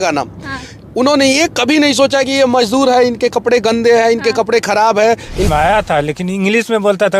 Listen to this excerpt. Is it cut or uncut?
cut